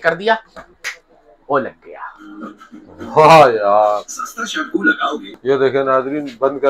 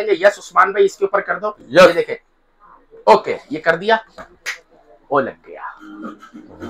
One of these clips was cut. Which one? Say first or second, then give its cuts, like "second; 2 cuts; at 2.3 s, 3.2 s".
first; 1 cut; at 5.3 s